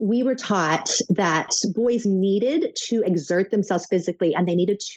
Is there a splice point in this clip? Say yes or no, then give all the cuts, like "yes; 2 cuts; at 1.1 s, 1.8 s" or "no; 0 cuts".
yes; 1 cut; at 1.5 s